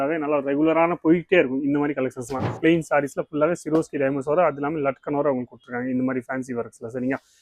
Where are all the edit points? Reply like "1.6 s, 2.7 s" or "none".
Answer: 2.6 s